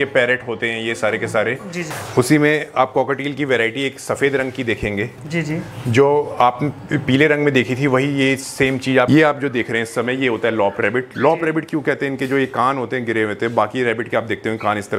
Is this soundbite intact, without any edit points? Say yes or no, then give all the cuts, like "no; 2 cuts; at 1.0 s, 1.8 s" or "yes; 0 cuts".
no; 2 cuts; at 1.9 s, 9.1 s